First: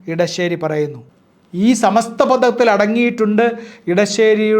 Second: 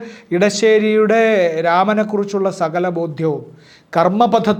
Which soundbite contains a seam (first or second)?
first